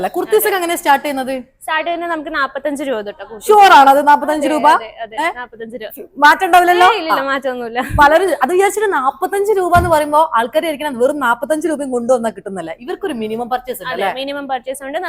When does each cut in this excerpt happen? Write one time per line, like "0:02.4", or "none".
none